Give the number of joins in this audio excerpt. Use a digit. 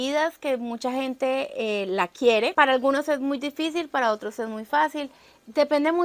1